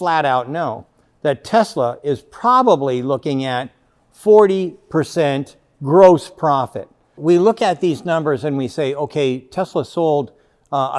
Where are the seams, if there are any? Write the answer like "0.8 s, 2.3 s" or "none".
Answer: 7.1 s

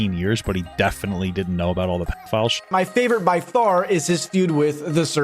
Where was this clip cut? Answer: 2.6 s

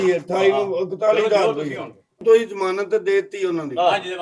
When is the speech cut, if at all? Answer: 2.2 s

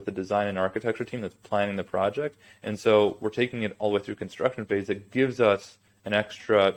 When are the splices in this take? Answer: none

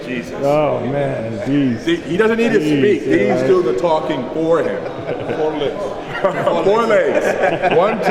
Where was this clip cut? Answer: none

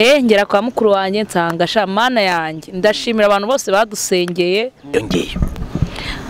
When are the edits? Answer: 4.8 s

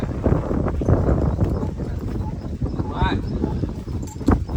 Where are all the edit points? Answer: none

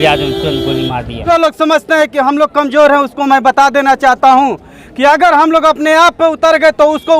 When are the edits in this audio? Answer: 1.1 s

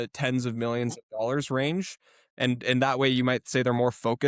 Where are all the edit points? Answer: none

